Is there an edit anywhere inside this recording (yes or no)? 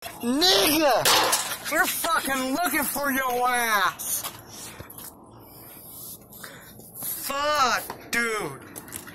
no